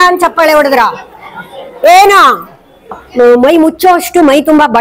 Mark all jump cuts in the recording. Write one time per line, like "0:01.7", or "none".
0:03.0

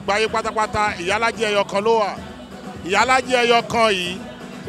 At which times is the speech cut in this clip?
none

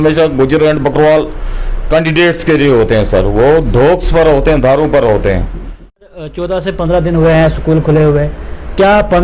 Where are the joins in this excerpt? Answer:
0:06.1

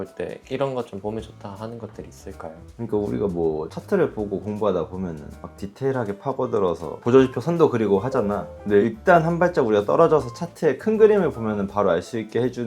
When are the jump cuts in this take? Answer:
0:02.6
0:08.5

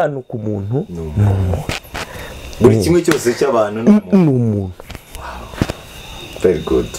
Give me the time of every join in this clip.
none

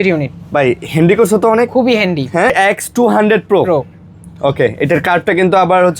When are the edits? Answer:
0:02.5

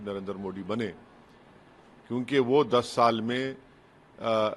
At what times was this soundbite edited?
none

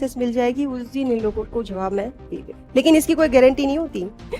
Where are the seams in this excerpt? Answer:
0:02.5

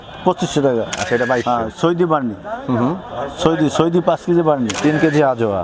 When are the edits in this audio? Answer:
0:01.0
0:04.7

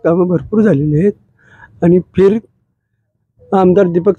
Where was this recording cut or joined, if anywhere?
none

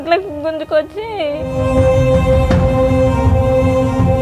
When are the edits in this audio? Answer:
0:01.4

